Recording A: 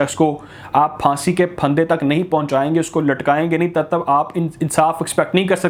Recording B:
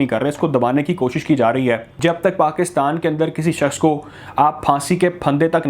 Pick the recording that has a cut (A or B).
B